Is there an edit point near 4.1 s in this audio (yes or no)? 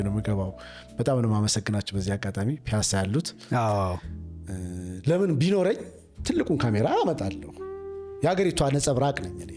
yes